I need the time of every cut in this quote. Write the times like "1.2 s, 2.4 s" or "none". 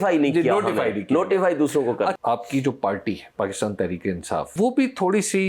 2.2 s, 3.3 s, 4.5 s